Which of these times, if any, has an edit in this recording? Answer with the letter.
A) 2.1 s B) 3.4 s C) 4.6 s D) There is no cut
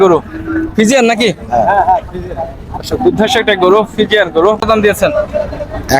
C